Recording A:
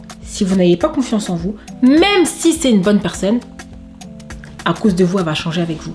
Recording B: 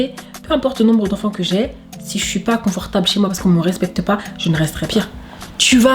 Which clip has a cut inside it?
B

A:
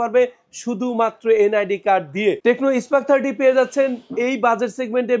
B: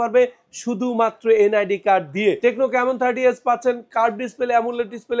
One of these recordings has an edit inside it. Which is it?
B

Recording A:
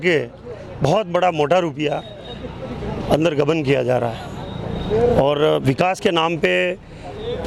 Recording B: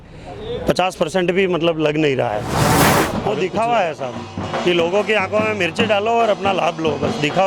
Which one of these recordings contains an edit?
B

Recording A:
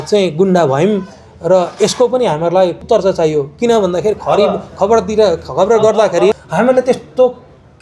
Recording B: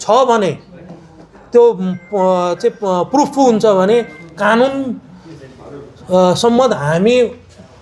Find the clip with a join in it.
A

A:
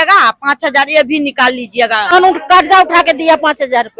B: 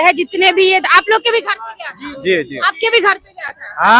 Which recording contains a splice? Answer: A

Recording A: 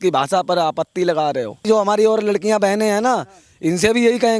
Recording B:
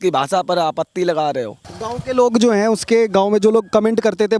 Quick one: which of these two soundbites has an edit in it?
A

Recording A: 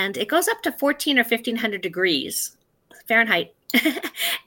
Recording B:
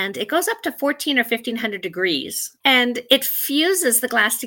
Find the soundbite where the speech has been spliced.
B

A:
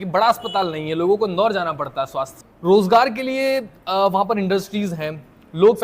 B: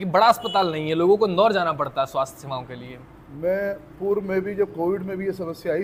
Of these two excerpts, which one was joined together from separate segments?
A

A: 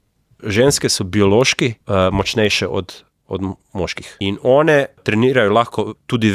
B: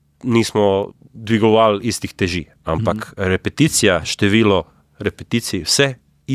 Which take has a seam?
A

